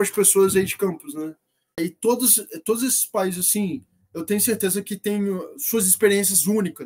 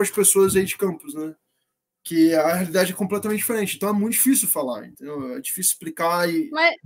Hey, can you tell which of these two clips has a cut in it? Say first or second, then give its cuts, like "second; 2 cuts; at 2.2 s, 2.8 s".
first; 1 cut; at 1.8 s